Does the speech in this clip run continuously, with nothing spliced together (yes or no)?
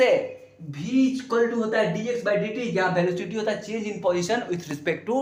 yes